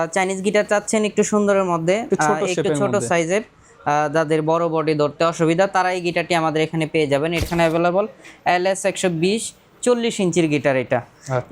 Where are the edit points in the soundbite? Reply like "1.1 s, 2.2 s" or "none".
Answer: 7.4 s